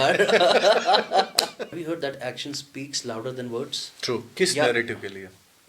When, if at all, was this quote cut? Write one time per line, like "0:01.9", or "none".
0:01.6
0:04.3